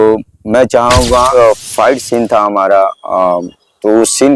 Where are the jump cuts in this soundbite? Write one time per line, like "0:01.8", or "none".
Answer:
0:01.3